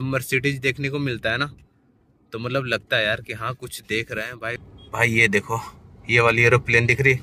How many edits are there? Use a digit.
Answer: 1